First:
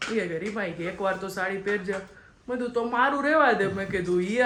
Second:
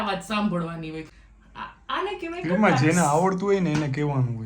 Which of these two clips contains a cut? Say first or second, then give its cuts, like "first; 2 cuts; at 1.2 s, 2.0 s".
second; 1 cut; at 1.1 s